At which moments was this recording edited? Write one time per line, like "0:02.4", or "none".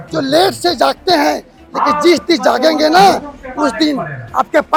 none